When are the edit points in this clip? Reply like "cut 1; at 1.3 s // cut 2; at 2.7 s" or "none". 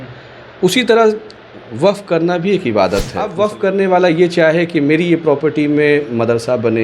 cut 1; at 3.3 s

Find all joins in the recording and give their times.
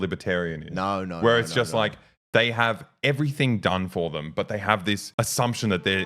cut 1; at 5.1 s

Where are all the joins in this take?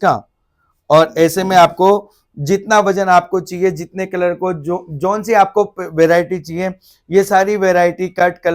none

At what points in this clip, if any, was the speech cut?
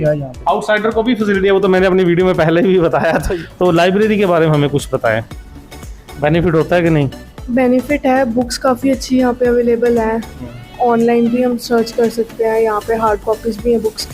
cut 1; at 3.3 s

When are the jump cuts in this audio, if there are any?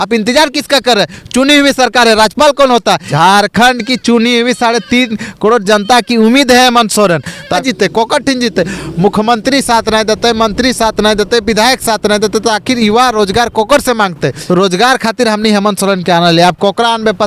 cut 1; at 3.1 s // cut 2; at 7.6 s // cut 3; at 14.3 s

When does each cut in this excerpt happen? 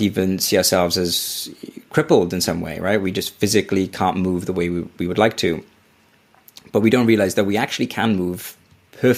none

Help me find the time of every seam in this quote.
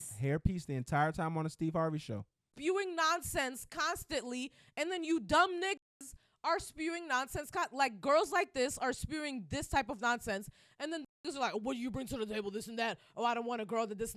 cut 1; at 2.5 s

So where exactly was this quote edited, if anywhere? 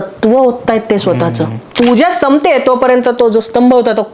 cut 1; at 1.6 s

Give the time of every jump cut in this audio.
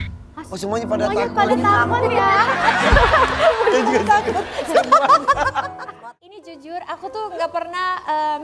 cut 1; at 6.0 s

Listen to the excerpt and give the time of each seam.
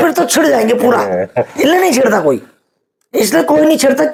none

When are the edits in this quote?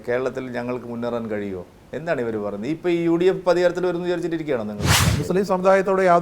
cut 1; at 5.0 s

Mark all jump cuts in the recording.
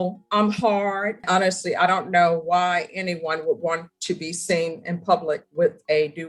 cut 1; at 1.2 s

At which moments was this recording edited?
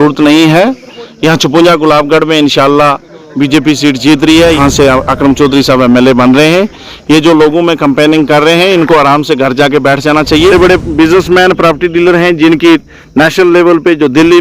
cut 1; at 4.6 s // cut 2; at 10.5 s

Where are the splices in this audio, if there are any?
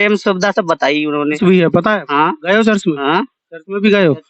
cut 1; at 1.4 s

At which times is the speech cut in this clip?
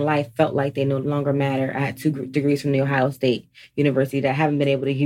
cut 1; at 1.0 s

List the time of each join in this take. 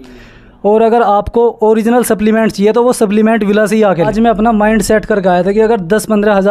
cut 1; at 4.1 s

